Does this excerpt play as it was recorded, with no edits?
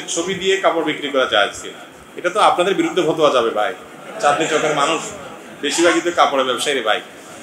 yes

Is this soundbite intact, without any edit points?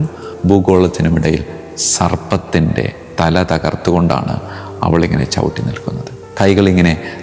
yes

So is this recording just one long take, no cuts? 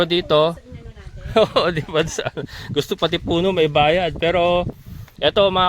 yes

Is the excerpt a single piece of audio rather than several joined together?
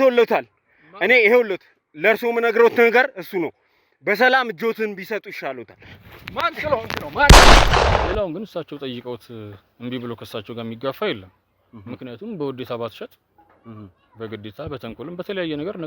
no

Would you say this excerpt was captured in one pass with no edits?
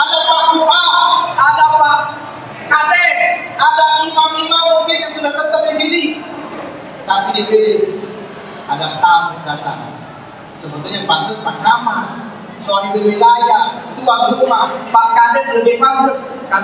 yes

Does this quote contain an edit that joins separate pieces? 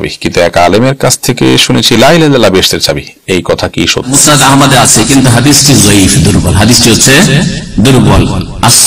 yes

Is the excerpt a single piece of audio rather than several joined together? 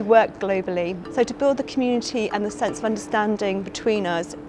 no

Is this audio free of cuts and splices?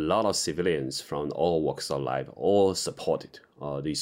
yes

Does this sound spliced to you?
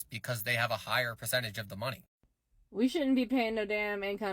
yes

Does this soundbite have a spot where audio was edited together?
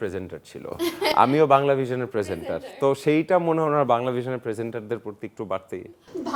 no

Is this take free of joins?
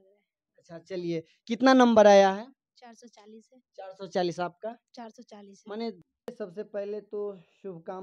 no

